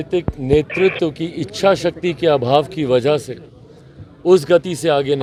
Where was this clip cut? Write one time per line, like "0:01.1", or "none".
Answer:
none